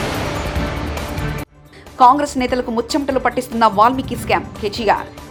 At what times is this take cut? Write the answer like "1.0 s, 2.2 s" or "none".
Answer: none